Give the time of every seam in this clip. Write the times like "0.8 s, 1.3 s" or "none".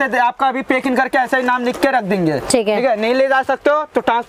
none